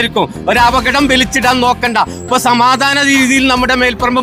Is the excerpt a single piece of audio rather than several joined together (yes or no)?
yes